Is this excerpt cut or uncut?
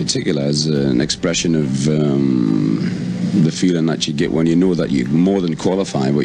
uncut